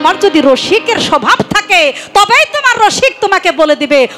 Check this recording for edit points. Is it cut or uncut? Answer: uncut